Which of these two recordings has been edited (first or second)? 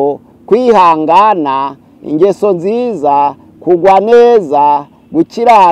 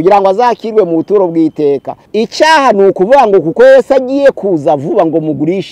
second